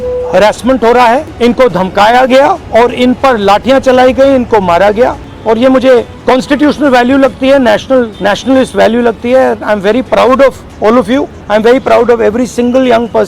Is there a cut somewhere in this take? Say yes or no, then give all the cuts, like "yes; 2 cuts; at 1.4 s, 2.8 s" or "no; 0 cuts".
yes; 6 cuts; at 1.3 s, 2.6 s, 5.3 s, 6.1 s, 8.1 s, 11.0 s